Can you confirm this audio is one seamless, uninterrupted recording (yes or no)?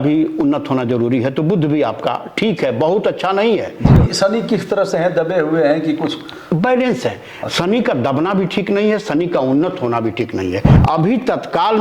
no